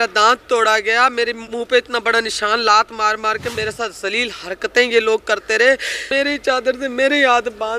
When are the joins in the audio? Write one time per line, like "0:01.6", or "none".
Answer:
0:01.4
0:03.5
0:06.0